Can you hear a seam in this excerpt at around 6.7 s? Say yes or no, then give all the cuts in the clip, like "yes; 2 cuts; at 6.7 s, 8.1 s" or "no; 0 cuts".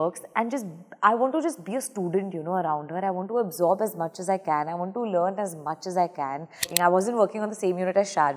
yes; 1 cut; at 6.7 s